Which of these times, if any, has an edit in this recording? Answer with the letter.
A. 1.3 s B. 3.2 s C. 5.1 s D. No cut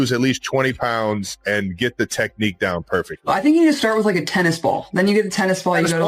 B